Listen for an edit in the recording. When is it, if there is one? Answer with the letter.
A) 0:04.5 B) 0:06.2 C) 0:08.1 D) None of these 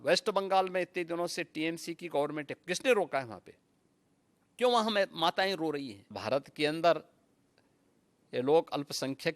B